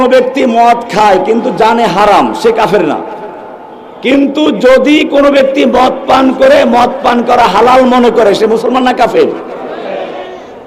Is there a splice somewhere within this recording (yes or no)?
no